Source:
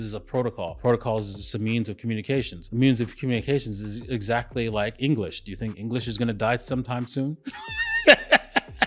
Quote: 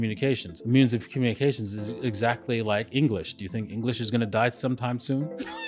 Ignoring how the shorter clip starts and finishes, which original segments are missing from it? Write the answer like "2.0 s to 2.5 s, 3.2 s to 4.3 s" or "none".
none